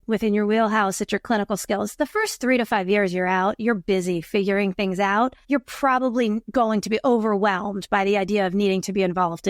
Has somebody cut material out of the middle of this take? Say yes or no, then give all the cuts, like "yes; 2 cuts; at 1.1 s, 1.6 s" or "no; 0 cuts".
yes; 1 cut; at 5.4 s